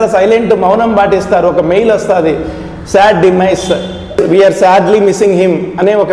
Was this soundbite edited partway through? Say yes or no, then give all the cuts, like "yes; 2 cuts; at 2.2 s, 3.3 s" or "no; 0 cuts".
no; 0 cuts